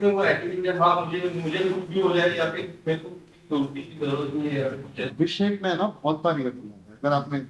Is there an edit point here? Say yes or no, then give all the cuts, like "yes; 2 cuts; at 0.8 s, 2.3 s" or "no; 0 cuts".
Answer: yes; 1 cut; at 5.1 s